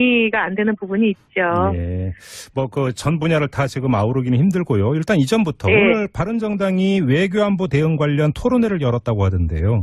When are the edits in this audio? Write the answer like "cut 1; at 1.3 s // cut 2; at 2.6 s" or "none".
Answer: none

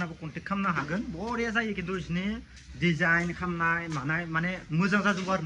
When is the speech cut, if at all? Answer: none

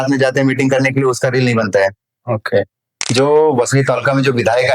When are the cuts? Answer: cut 1; at 3.1 s

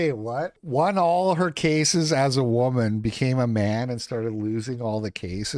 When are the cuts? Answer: none

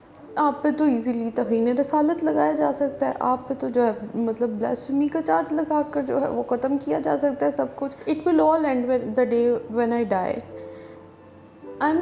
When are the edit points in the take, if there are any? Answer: cut 1; at 7.9 s

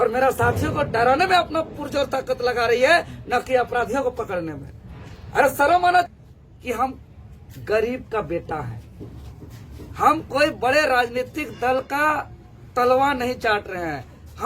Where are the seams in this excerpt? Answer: cut 1; at 6.1 s

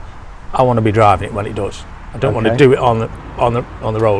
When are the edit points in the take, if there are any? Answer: none

